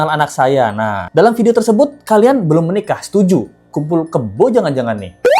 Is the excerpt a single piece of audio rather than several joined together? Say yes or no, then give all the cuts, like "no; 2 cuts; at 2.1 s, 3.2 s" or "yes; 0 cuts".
no; 1 cut; at 1.0 s